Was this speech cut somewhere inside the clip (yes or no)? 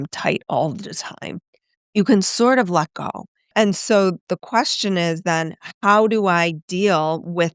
yes